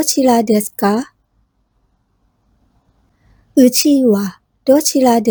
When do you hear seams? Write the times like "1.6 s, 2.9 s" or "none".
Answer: none